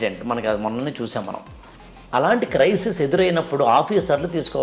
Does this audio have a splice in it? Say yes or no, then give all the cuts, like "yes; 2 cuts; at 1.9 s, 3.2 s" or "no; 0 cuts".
yes; 1 cut; at 2.0 s